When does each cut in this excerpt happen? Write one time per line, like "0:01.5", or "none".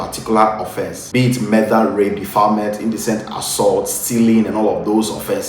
0:00.9